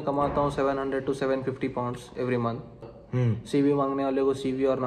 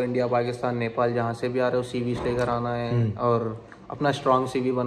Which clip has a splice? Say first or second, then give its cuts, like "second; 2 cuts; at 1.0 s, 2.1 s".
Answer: first; 1 cut; at 3.0 s